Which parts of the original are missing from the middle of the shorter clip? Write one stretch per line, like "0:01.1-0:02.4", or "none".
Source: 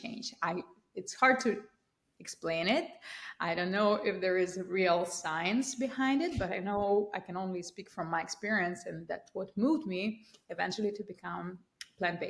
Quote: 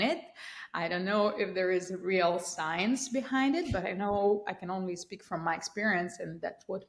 none

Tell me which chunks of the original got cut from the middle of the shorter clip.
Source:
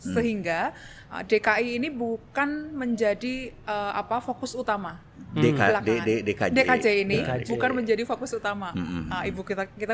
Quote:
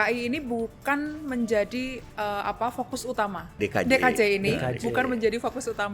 0:05.1-0:06.2

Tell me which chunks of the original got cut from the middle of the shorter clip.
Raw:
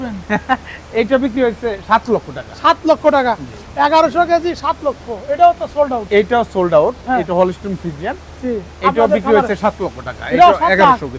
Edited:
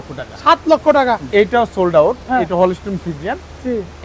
0:03.4-0:06.0

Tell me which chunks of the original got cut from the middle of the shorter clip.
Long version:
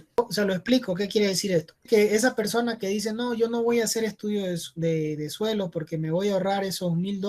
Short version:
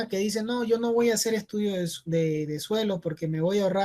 none

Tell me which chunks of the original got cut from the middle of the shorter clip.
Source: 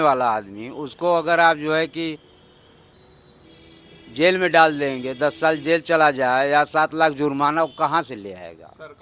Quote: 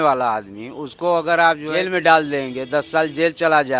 0:01.7-0:04.2

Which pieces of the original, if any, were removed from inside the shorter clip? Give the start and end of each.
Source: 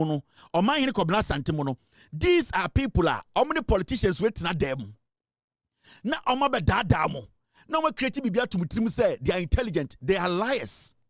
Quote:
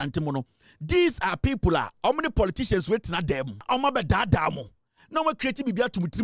0:04.9-0:06.2

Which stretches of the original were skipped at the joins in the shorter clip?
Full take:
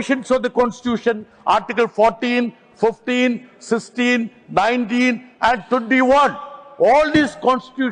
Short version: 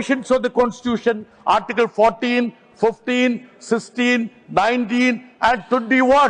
none

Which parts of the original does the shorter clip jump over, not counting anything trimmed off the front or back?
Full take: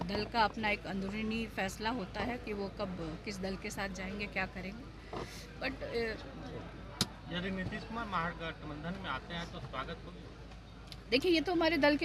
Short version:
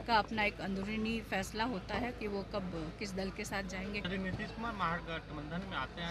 0:04.3-0:07.4

